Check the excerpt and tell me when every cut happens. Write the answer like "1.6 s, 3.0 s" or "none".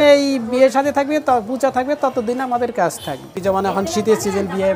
3.3 s